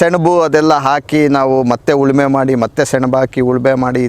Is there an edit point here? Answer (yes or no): no